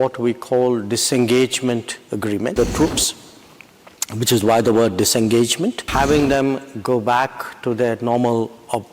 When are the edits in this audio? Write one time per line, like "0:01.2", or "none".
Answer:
0:02.5
0:05.8